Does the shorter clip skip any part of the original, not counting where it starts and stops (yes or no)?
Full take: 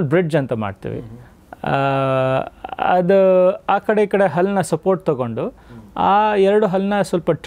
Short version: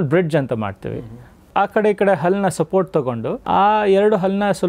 yes